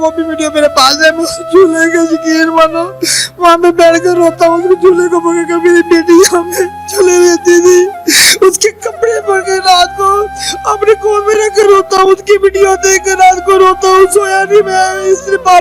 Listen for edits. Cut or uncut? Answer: uncut